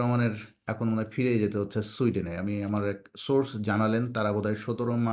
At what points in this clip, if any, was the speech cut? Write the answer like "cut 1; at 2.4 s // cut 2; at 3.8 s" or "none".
none